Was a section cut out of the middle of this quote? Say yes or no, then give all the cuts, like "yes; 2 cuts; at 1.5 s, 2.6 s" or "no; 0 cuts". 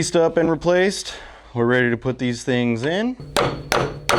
yes; 1 cut; at 3.2 s